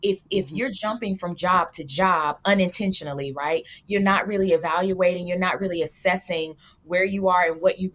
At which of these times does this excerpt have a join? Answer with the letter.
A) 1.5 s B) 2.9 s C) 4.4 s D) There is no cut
D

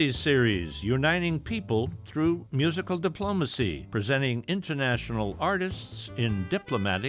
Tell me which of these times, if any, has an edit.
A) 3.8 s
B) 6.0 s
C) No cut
A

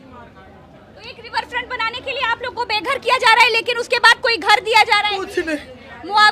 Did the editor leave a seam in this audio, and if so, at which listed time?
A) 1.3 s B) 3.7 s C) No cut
C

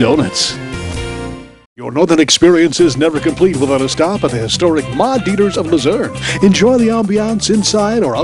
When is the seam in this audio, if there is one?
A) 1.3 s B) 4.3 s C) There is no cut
A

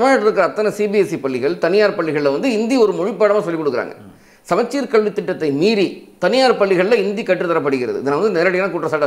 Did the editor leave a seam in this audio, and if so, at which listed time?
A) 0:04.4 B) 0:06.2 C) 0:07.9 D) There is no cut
D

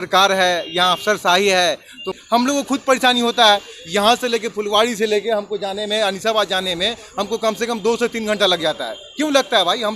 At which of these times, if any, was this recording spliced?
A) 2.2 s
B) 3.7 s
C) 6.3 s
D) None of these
A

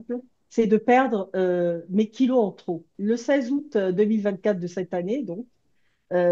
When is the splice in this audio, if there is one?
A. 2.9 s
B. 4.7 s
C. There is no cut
A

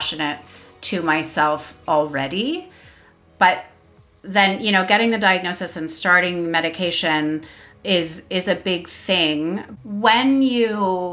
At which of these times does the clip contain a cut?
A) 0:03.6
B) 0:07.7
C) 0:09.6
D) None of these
C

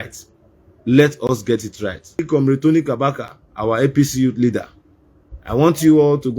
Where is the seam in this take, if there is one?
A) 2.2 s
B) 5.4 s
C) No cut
A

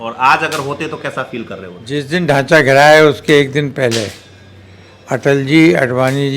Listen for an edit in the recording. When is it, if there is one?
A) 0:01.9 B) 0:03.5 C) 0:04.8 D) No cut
A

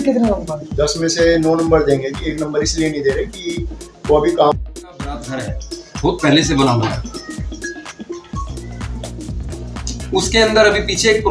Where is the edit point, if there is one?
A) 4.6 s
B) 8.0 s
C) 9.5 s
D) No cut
A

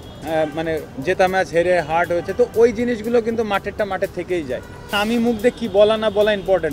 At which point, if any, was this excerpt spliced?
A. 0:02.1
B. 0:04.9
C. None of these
B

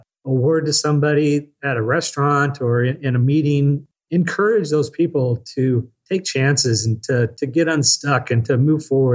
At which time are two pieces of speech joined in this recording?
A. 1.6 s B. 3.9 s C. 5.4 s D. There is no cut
B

